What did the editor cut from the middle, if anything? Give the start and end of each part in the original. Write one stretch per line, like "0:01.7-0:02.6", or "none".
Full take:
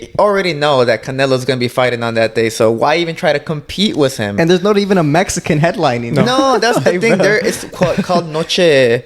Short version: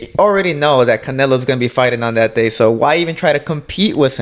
none